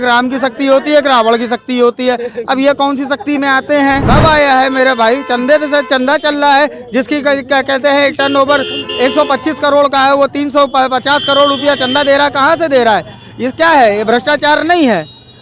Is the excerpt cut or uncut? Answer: cut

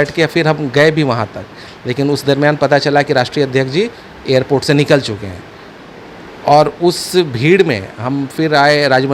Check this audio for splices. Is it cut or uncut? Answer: uncut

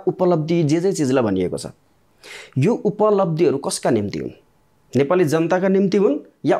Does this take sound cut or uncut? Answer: uncut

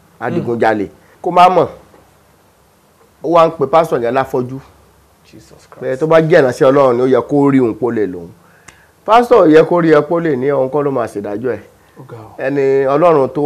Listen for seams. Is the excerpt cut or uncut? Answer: cut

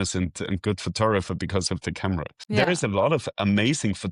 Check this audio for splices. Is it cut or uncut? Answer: uncut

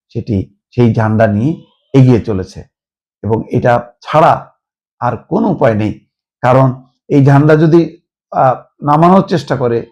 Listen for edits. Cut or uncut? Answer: uncut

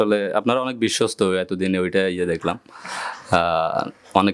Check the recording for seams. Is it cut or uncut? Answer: uncut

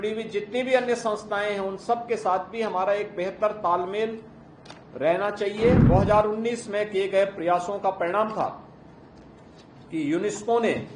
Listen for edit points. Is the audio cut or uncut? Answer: cut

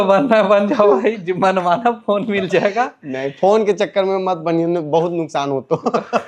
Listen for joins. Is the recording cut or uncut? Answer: uncut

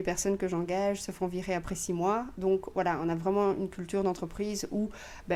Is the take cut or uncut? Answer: uncut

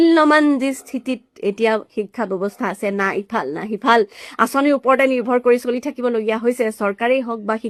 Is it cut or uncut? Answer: uncut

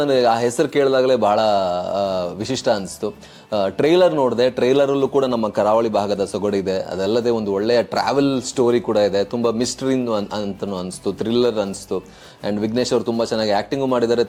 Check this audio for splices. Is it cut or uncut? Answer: uncut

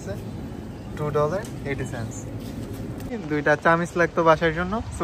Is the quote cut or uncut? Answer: cut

